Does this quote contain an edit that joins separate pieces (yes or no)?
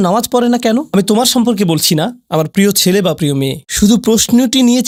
no